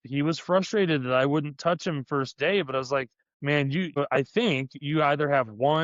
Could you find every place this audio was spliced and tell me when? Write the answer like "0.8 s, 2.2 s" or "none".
3.9 s